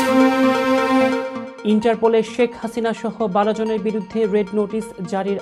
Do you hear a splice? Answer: no; 0 cuts

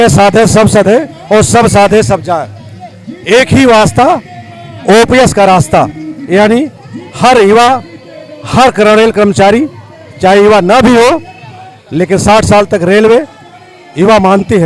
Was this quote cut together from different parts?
no; 0 cuts

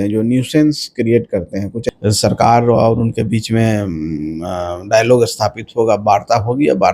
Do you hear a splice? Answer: yes; 1 cut; at 1.8 s

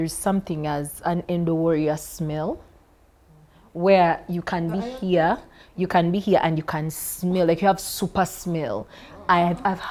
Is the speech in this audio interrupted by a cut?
no; 0 cuts

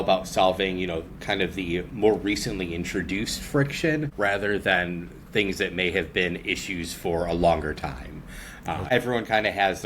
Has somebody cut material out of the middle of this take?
yes; 1 cut; at 8.8 s

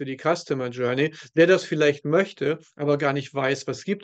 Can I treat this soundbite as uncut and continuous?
yes; 0 cuts

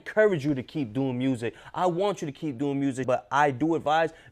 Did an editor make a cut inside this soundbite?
yes; 1 cut; at 3.0 s

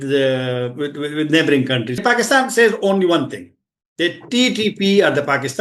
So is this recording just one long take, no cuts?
no; 1 cut; at 2.0 s

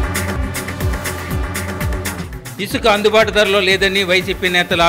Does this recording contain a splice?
no; 0 cuts

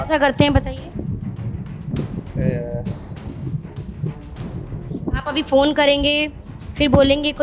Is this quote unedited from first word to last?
yes; 0 cuts

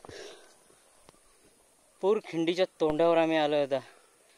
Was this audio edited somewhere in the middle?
no; 0 cuts

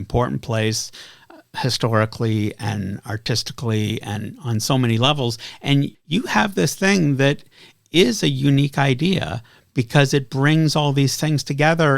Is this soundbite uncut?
no; 1 cut; at 6.0 s

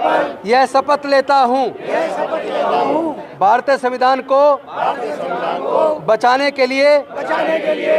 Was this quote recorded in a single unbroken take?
no; 1 cut; at 3.3 s

